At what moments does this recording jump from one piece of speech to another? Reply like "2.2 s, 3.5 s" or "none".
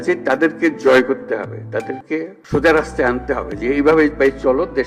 2.4 s